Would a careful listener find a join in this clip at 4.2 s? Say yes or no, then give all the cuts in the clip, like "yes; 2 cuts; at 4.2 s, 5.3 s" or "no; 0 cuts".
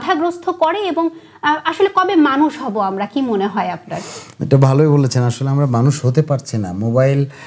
no; 0 cuts